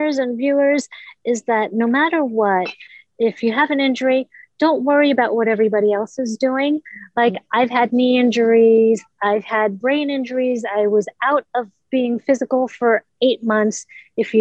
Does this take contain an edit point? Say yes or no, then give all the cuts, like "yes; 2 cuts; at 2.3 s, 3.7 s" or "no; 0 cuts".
no; 0 cuts